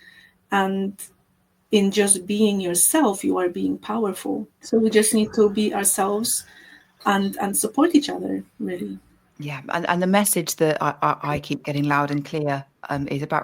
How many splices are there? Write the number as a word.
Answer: one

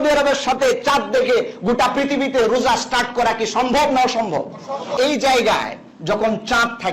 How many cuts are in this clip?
one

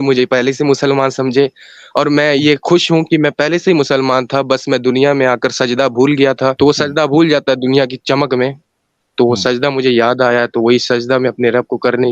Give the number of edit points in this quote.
one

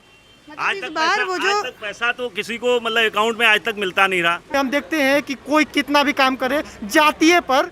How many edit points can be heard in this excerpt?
one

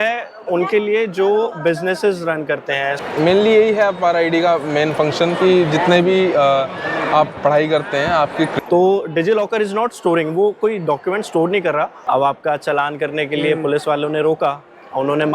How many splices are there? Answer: three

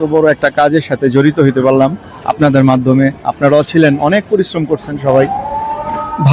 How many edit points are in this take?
zero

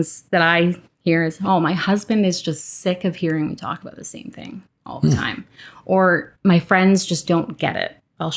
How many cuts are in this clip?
zero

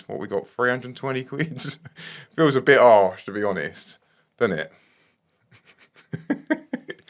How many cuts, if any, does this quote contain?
zero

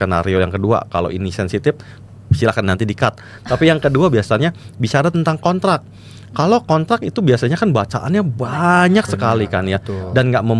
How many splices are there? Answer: zero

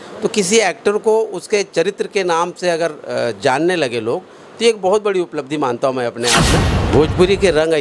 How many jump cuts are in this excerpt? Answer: one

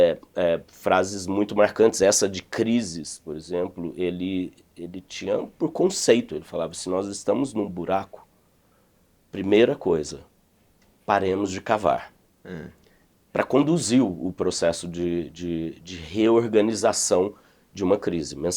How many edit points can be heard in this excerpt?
zero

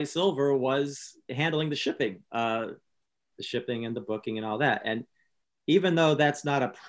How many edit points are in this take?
one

